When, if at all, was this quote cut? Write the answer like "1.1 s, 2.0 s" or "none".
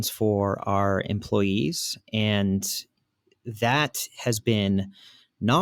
none

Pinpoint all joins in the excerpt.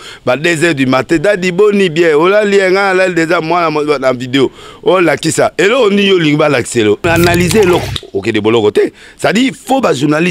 7.0 s

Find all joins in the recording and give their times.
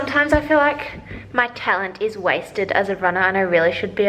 none

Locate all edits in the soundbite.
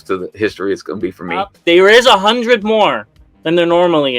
1.5 s

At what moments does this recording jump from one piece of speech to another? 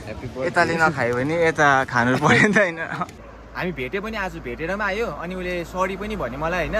3.3 s

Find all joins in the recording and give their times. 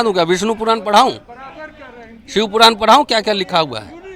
none

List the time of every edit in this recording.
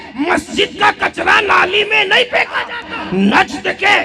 2.9 s

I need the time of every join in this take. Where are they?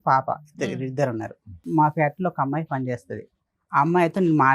1.7 s

